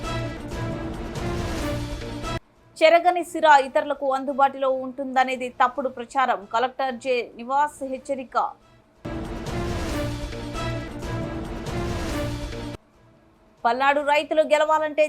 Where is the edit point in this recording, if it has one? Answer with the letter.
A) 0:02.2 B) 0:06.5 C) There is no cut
A